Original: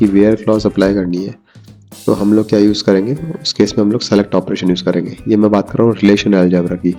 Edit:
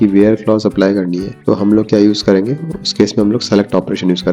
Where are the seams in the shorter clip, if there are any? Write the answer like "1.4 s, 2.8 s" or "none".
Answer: 1.3 s